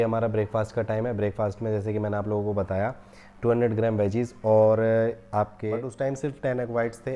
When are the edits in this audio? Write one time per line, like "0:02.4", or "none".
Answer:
0:05.9